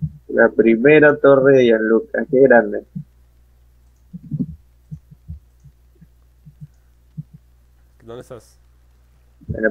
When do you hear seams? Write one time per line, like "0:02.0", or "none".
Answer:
none